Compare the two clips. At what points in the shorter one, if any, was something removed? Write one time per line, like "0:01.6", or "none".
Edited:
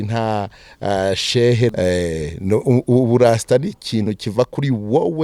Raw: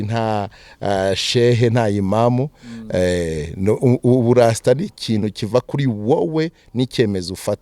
0:01.7